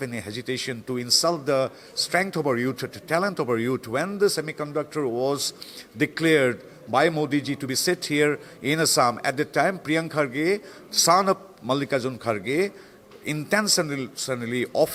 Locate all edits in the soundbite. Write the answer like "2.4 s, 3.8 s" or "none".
none